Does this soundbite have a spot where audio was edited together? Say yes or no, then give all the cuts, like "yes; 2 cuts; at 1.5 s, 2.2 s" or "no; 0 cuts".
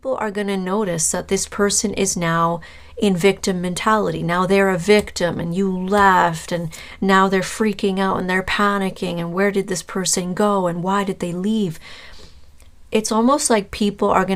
no; 0 cuts